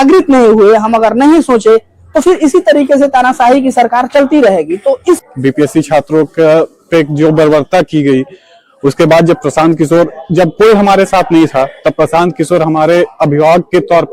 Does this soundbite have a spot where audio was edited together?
yes; 1 cut; at 5.3 s

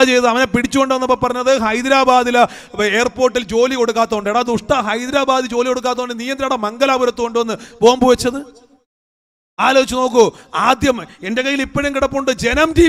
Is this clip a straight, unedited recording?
yes; 0 cuts

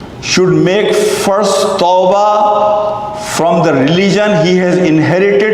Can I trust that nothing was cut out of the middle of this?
yes; 0 cuts

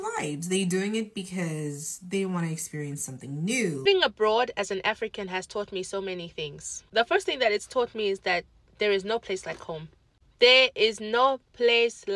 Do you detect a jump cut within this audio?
yes; 1 cut; at 3.8 s

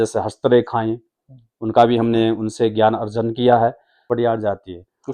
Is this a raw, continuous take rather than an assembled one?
no; 1 cut; at 4.1 s

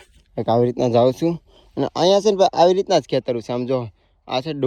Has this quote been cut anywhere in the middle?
no; 0 cuts

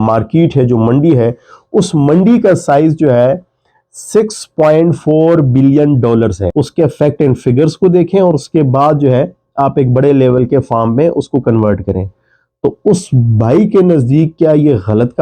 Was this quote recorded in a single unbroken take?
no; 1 cut; at 6.4 s

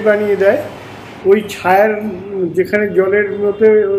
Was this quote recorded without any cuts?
no; 1 cut; at 0.9 s

